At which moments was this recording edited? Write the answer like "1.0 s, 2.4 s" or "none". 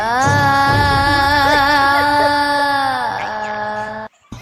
none